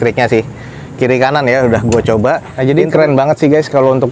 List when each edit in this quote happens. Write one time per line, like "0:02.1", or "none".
0:02.5